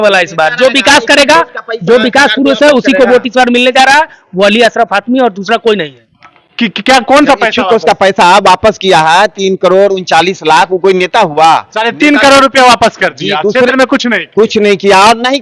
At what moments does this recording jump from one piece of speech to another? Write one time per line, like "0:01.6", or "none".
none

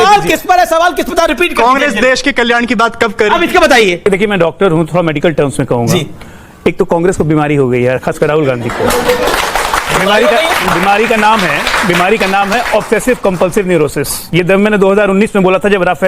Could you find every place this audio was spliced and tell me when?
0:04.0

